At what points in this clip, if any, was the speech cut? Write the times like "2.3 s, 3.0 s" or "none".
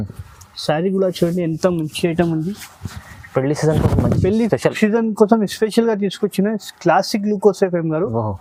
none